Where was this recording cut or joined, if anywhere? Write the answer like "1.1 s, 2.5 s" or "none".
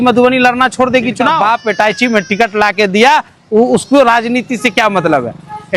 1.3 s